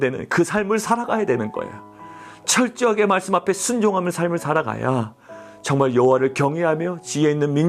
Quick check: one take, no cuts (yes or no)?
yes